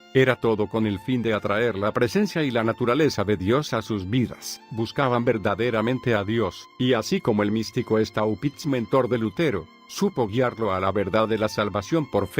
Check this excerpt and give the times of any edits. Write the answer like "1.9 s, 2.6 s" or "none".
9.9 s